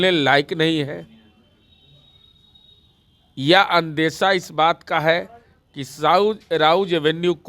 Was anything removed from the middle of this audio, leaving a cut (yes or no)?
no